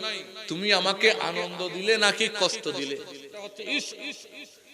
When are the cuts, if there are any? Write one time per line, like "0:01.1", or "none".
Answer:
0:03.5